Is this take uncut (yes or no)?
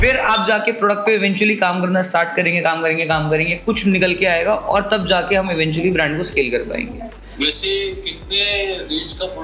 yes